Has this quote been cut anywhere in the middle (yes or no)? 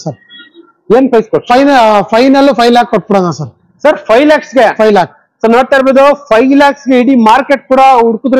no